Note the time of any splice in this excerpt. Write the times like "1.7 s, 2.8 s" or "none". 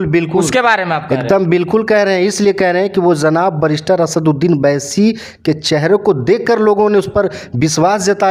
none